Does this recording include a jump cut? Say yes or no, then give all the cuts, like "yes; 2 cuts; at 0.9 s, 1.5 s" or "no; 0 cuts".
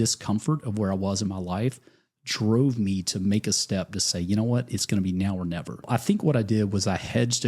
yes; 1 cut; at 5.9 s